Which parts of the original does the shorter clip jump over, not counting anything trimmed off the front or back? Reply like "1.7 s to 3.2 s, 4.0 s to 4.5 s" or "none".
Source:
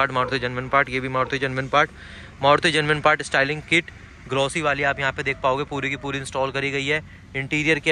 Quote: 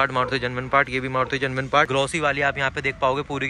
1.9 s to 4.3 s

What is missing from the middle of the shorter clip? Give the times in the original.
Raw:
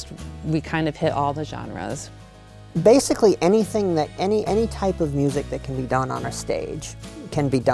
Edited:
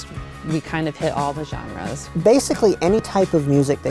2.0 s to 2.6 s, 3.7 s to 4.7 s

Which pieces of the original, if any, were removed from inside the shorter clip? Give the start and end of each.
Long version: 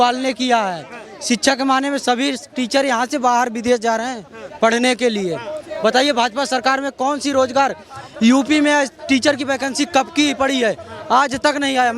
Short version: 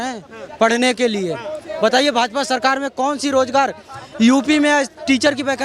none

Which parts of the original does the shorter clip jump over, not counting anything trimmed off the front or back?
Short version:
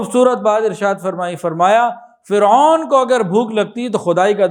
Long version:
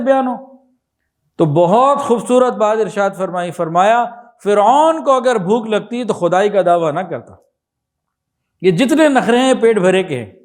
none

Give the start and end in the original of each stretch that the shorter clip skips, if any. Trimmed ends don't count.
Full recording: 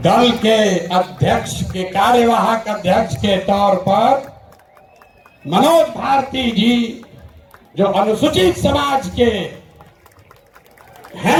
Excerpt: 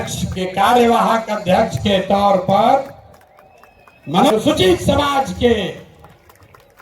5.7 s to 8.1 s

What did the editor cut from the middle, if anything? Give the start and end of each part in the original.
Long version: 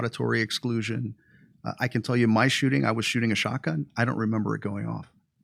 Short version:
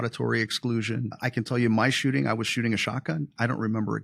1.1 s to 1.7 s

